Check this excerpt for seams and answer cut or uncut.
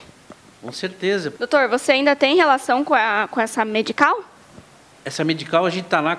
cut